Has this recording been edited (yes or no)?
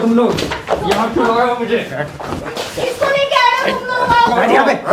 no